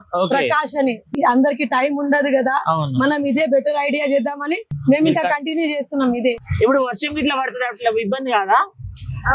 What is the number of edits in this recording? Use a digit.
3